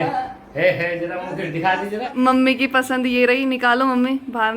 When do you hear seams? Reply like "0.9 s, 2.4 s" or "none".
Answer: 2.1 s